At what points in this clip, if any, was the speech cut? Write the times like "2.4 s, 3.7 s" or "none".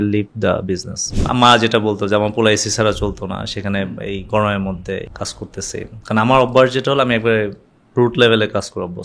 1.1 s, 5.1 s